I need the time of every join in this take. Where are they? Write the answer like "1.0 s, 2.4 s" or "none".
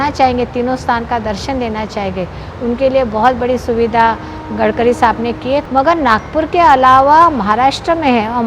5.6 s